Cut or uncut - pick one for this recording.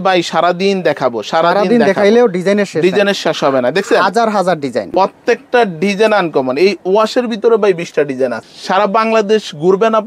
cut